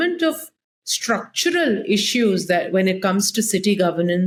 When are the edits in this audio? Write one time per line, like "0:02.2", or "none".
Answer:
none

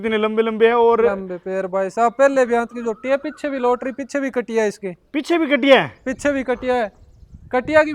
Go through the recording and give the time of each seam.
none

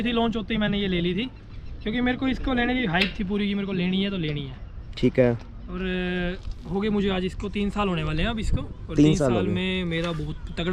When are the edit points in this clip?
none

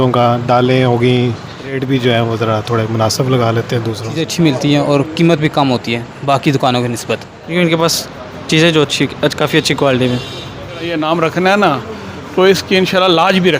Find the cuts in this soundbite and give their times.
0:01.8
0:04.2
0:07.4
0:10.9

